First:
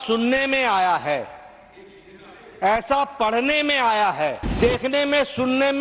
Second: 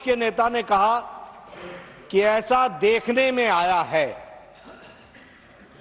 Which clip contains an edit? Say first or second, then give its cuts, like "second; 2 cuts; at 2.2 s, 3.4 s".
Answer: first; 1 cut; at 4.5 s